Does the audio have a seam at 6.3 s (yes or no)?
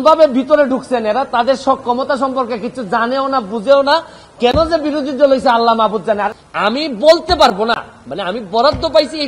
yes